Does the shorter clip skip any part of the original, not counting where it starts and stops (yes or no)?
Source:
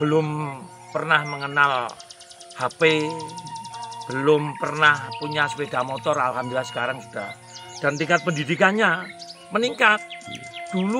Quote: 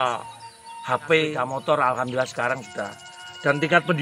yes